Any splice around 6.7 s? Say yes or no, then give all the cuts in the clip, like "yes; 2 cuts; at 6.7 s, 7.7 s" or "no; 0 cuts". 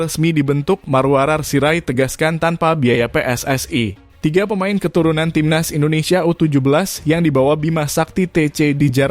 no; 1 cut; at 4.1 s